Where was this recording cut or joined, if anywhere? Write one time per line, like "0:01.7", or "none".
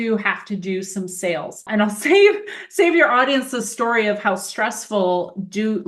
0:01.7